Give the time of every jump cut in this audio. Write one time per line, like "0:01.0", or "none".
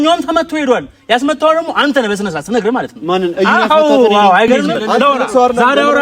0:04.7